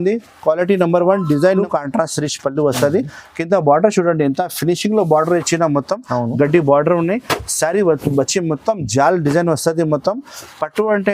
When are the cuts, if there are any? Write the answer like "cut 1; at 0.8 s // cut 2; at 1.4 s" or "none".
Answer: cut 1; at 1.6 s